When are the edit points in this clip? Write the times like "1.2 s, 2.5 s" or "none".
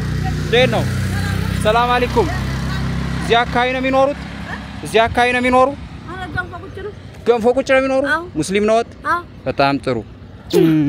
none